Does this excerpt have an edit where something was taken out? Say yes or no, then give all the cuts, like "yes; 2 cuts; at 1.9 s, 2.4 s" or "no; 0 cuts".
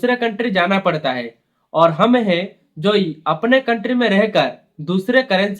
no; 0 cuts